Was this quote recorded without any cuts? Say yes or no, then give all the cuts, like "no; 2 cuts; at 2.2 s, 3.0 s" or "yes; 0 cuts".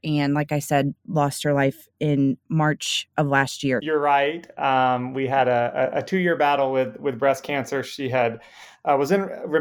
no; 1 cut; at 3.8 s